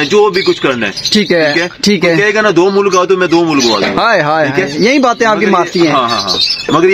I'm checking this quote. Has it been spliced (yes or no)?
no